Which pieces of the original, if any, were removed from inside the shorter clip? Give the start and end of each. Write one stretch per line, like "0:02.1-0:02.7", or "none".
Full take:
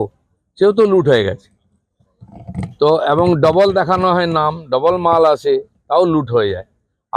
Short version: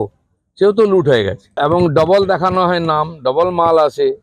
0:01.6-0:03.0